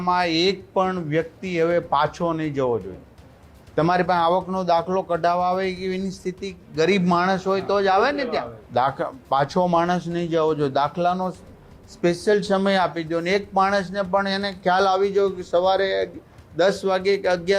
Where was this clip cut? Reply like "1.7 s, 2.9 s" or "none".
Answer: 8.6 s